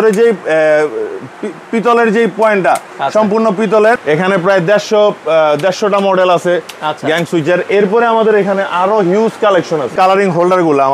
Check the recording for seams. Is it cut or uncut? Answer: cut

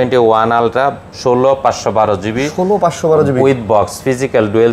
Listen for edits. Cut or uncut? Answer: uncut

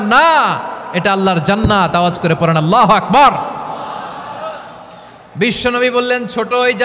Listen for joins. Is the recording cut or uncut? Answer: uncut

